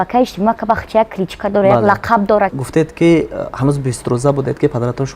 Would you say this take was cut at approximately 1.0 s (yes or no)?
no